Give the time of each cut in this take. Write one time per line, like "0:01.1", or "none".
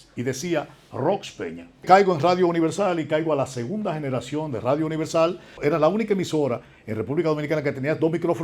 0:01.8
0:05.5

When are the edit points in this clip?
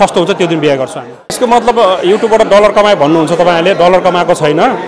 0:01.4

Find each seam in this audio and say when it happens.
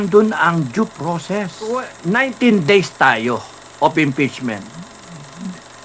0:01.9

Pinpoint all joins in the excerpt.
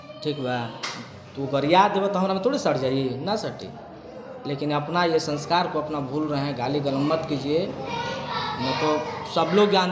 none

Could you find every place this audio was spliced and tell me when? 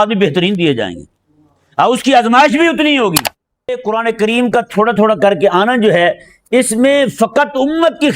0:03.8

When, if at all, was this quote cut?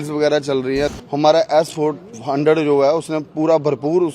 0:00.9

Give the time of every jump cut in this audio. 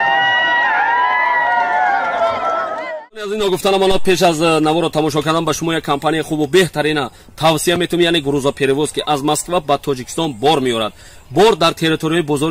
0:02.8

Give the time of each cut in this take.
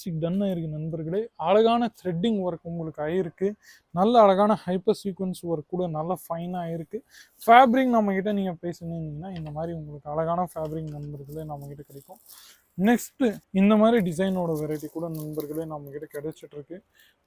none

